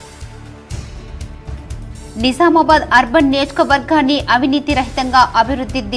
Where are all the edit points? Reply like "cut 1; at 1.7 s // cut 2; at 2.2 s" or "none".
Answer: none